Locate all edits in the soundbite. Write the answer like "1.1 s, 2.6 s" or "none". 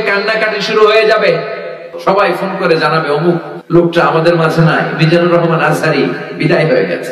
1.9 s, 3.5 s